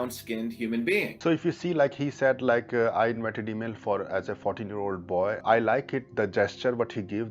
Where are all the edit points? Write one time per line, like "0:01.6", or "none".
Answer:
0:01.1
0:05.4